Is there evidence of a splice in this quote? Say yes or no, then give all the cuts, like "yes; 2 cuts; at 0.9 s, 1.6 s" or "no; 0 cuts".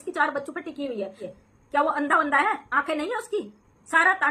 yes; 1 cut; at 1.2 s